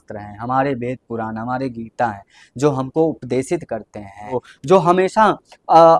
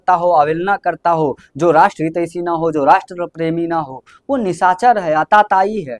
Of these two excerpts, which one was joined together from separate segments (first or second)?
first